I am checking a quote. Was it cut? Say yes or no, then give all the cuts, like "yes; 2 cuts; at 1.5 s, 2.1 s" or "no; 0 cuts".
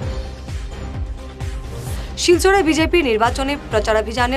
no; 0 cuts